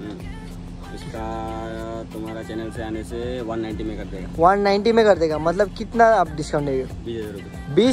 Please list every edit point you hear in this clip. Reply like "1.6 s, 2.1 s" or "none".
none